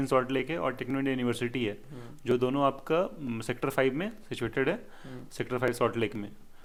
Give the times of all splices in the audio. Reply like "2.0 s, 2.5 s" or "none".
none